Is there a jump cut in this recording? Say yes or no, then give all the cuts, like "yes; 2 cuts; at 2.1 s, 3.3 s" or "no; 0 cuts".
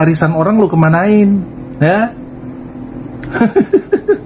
no; 0 cuts